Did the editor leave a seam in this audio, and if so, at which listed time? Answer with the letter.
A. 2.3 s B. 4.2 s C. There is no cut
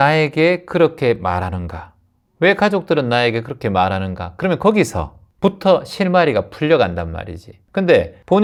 C